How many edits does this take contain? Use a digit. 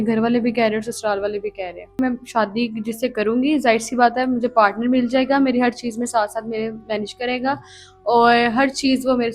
1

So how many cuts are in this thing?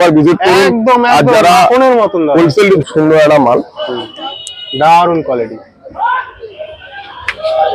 1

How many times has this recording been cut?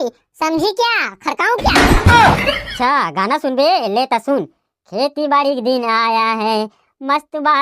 1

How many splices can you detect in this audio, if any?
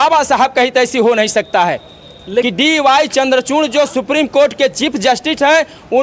1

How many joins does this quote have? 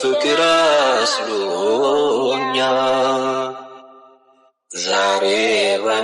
1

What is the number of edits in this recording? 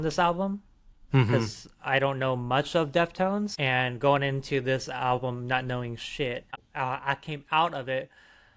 2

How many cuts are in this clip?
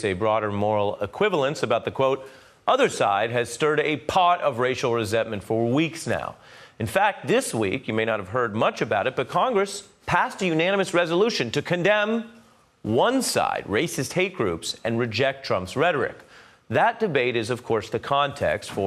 1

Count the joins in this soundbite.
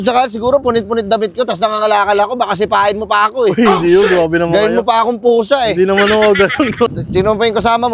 1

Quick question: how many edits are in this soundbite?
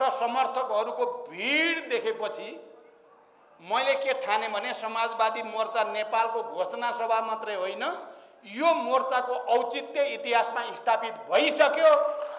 0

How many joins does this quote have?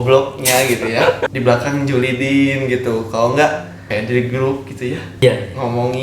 3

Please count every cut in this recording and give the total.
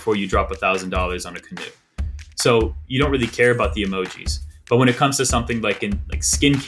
0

